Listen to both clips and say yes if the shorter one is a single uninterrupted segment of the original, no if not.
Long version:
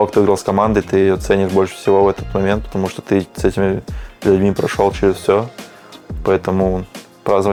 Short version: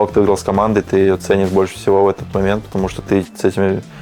yes